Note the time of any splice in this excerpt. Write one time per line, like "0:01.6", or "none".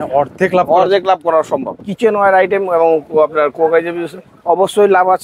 0:01.8